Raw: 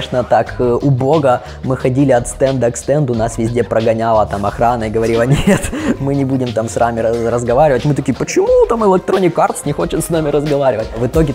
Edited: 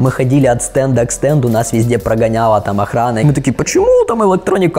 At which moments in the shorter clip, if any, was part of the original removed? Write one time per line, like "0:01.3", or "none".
0:03.2